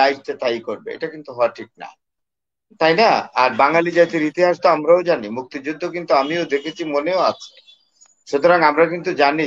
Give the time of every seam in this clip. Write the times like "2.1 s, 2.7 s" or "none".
none